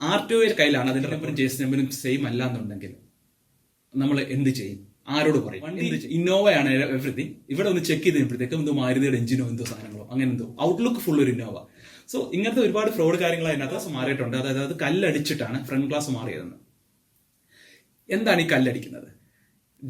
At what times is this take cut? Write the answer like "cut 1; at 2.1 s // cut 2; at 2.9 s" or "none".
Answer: cut 1; at 1.2 s // cut 2; at 5.8 s // cut 3; at 13.9 s